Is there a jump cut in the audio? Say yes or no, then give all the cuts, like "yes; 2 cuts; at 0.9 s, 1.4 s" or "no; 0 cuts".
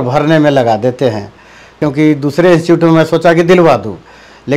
yes; 1 cut; at 1.7 s